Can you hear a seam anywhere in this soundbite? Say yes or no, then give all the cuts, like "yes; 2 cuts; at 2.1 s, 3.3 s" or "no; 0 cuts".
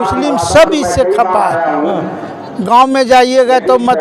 no; 0 cuts